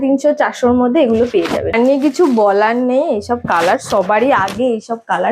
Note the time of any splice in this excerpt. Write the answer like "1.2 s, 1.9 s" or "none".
1.7 s